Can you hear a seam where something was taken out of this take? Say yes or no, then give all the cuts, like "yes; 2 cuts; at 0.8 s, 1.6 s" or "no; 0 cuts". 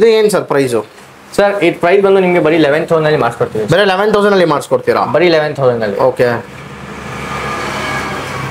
no; 0 cuts